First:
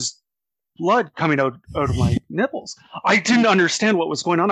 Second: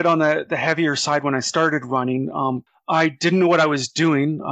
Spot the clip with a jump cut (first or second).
second